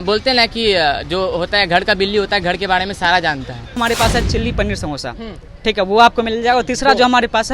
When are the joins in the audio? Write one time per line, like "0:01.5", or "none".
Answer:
0:03.8